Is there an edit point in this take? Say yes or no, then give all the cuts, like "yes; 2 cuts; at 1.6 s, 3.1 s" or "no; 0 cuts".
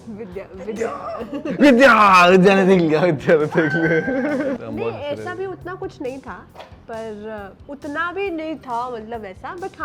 yes; 1 cut; at 4.6 s